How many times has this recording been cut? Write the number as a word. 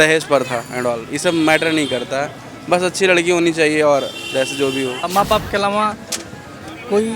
one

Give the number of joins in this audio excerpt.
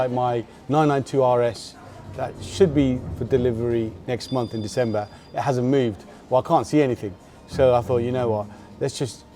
zero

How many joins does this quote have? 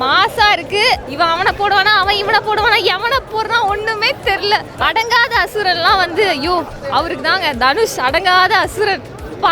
two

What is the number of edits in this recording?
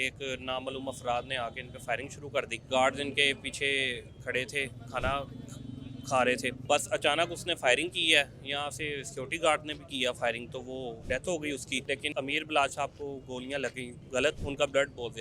five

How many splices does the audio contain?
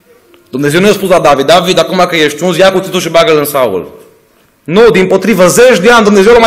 one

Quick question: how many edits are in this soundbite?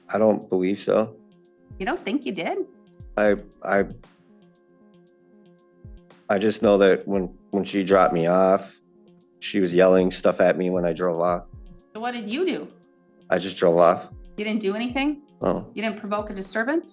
one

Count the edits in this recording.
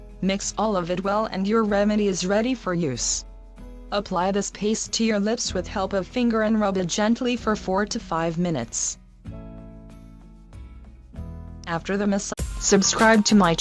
zero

